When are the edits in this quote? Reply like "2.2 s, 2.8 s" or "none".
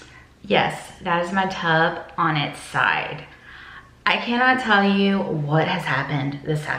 none